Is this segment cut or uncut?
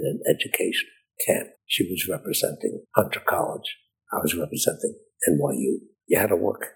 cut